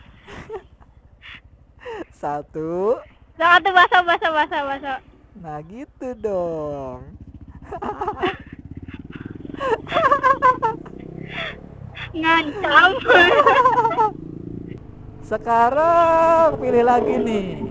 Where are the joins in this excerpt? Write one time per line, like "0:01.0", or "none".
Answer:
0:14.8